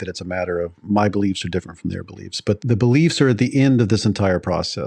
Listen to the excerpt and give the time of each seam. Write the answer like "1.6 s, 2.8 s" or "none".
2.6 s